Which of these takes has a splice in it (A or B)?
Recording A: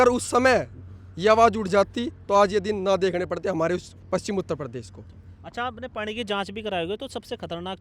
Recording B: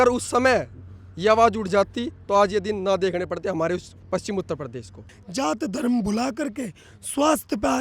B